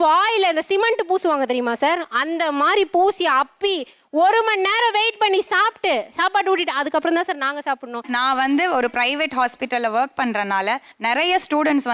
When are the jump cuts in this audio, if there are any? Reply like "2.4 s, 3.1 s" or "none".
8.1 s